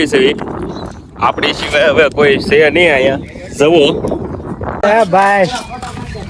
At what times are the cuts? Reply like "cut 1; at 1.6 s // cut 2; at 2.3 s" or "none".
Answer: cut 1; at 4.8 s